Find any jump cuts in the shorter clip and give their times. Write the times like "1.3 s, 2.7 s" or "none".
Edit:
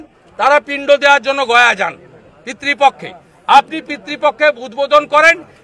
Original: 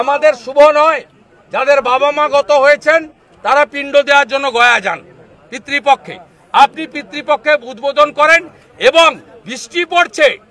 none